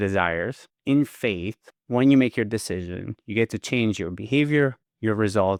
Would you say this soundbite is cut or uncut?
uncut